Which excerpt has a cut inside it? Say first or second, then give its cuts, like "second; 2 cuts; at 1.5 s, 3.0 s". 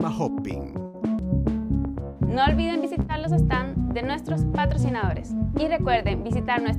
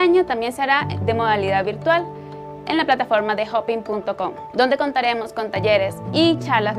first; 1 cut; at 1.2 s